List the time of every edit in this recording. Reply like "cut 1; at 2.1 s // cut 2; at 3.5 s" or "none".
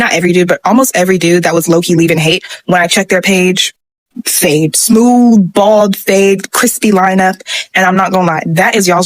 none